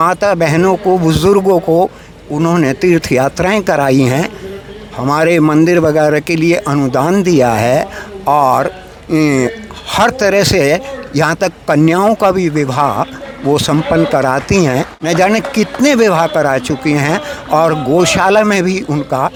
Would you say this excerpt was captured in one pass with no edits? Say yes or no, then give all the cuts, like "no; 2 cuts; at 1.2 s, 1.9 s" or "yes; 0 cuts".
yes; 0 cuts